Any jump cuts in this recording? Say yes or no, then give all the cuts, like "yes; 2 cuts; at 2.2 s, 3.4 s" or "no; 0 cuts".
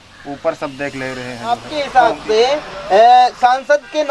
yes; 1 cut; at 1.6 s